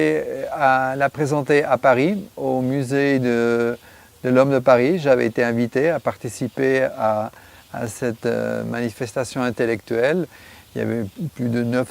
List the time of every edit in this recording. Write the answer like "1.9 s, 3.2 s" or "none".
7.1 s